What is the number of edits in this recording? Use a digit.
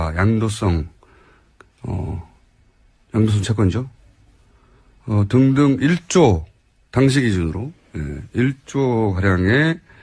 1